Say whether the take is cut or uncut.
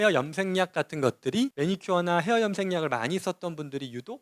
cut